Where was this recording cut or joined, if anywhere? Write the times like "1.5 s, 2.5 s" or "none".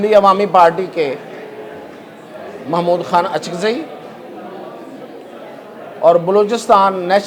none